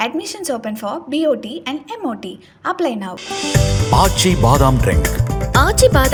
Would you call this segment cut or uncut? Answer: uncut